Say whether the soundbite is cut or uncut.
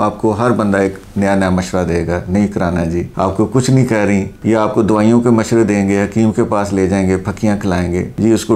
uncut